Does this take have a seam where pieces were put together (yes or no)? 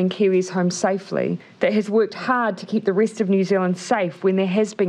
yes